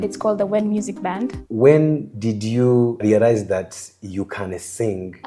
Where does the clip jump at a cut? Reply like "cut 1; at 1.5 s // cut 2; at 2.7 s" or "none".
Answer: cut 1; at 1.5 s

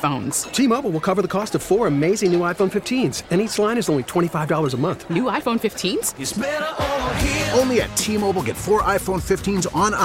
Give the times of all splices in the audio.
none

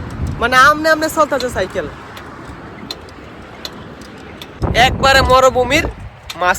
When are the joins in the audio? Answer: cut 1; at 4.6 s

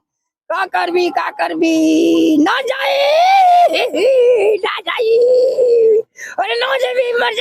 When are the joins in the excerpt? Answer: none

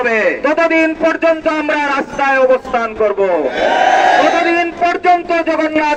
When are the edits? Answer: none

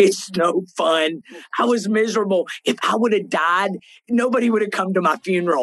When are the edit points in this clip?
none

